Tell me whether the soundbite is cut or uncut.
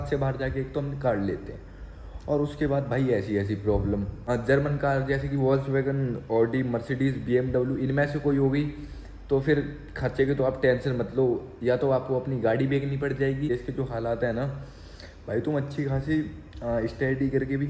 cut